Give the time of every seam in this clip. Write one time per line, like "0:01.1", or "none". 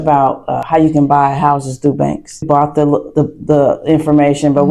0:02.5